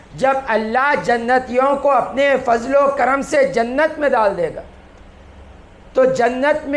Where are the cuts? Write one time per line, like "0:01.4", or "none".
none